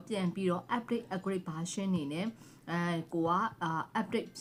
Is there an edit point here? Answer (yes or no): no